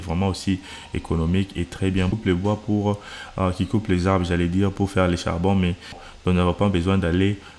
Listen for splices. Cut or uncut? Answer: cut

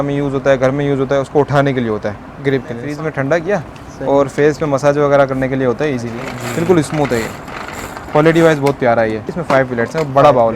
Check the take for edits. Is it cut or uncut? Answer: cut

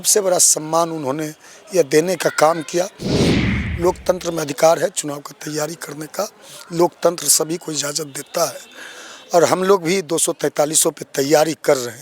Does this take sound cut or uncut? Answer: cut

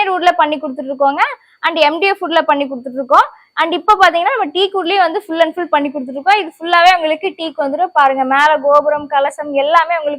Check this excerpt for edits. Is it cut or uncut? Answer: uncut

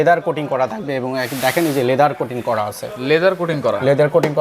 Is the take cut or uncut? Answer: uncut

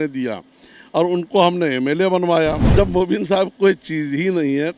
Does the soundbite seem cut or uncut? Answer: cut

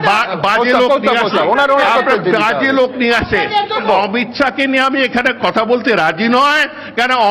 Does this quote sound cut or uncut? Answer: cut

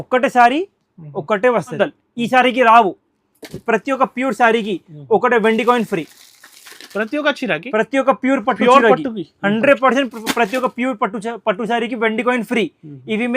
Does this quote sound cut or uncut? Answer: cut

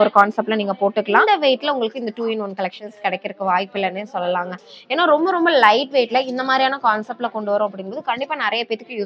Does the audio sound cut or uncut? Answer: cut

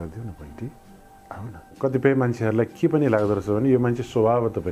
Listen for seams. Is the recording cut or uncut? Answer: cut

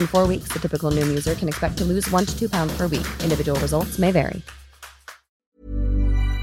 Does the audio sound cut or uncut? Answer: cut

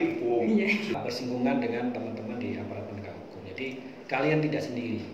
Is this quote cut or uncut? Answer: cut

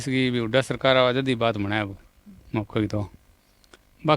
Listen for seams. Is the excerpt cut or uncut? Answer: uncut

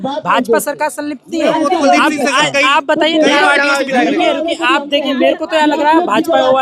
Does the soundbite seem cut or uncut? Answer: uncut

